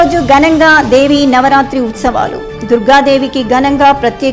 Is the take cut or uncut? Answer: uncut